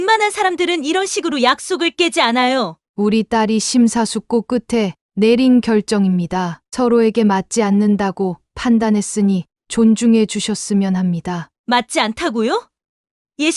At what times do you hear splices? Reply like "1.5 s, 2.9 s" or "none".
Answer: 2.8 s